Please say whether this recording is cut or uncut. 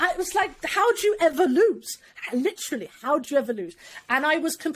uncut